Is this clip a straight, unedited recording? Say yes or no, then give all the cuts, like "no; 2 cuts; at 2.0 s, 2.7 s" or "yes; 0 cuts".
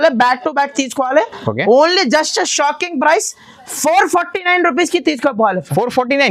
yes; 0 cuts